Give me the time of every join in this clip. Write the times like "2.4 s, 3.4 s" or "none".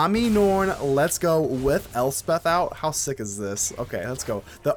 none

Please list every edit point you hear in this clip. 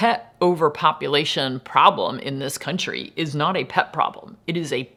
none

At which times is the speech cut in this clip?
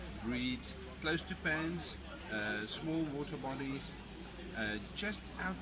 none

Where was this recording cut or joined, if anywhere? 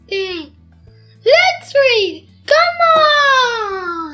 none

